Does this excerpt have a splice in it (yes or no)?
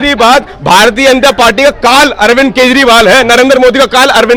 no